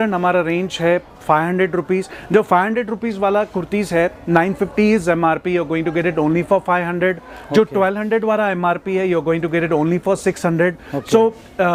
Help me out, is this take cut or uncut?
uncut